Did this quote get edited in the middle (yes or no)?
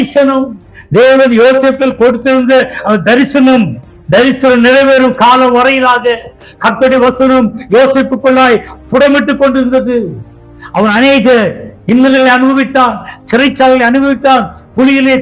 yes